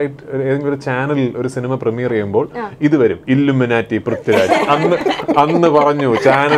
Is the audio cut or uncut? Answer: uncut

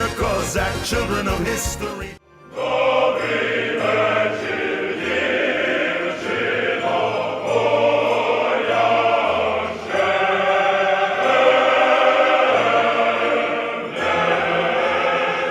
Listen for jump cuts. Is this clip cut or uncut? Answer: cut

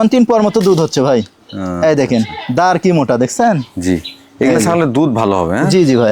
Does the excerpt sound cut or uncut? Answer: uncut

